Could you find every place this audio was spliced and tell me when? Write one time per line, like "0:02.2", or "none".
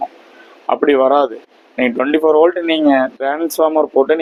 none